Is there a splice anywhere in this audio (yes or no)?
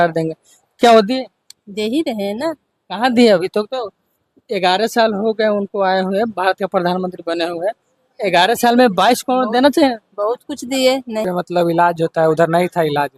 yes